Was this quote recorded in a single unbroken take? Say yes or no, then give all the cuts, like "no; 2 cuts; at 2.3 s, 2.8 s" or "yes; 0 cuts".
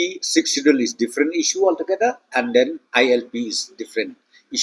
yes; 0 cuts